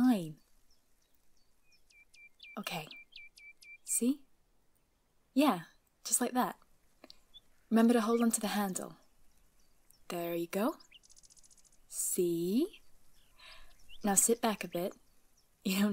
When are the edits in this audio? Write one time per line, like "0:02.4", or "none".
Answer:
none